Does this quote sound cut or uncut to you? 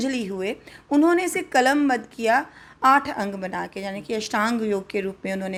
uncut